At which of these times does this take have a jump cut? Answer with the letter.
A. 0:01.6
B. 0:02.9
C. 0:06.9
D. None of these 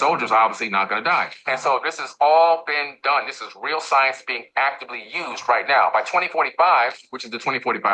D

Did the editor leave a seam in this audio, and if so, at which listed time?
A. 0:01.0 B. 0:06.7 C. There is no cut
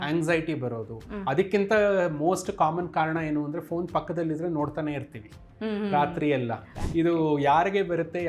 B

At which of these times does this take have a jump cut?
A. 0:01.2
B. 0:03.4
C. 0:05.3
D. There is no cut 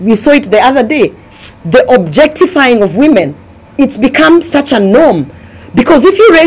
D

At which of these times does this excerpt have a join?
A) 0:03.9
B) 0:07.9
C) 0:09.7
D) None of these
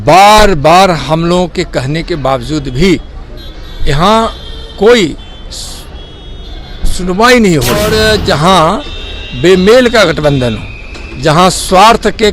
B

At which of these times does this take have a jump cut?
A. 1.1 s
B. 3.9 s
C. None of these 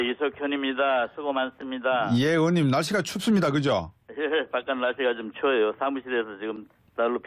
B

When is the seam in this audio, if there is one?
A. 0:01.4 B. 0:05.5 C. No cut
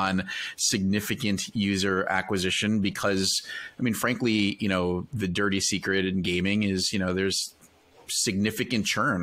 C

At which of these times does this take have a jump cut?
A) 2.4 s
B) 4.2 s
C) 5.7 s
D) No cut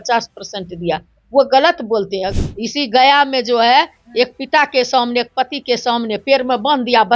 A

